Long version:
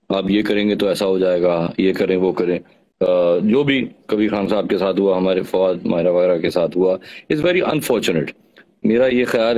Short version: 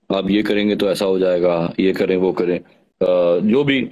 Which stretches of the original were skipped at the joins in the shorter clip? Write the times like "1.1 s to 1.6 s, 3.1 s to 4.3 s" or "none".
none